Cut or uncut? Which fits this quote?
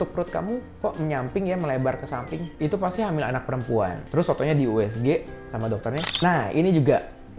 cut